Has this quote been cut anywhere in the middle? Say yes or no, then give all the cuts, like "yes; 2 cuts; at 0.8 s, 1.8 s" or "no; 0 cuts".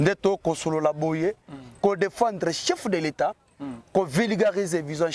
no; 0 cuts